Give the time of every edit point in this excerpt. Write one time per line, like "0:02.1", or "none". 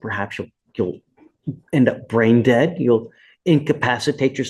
none